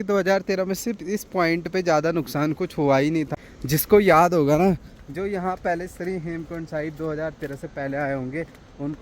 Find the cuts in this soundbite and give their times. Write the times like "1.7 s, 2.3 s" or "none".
3.3 s